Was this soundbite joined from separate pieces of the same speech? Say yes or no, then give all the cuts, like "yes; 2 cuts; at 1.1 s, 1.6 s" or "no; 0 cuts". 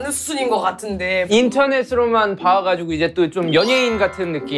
yes; 1 cut; at 1.3 s